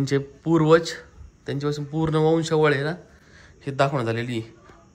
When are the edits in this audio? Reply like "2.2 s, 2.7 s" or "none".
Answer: none